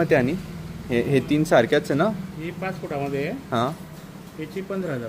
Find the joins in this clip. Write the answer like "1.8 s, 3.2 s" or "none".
none